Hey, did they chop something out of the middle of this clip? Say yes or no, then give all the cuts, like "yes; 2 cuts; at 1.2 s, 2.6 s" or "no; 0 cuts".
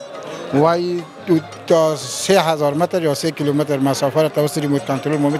no; 0 cuts